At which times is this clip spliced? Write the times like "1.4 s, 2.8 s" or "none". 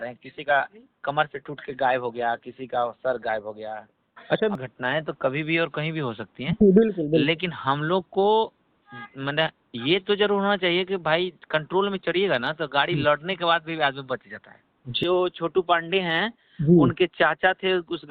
4.5 s, 15.0 s